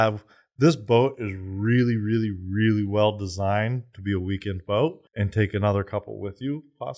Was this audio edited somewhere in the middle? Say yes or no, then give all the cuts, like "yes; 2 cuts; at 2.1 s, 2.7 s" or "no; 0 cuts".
no; 0 cuts